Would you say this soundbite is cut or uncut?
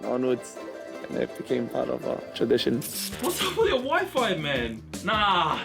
cut